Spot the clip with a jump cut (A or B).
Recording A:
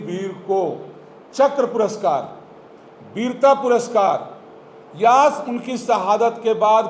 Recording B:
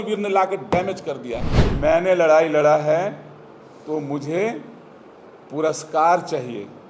B